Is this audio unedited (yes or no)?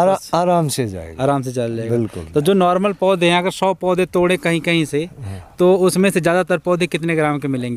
yes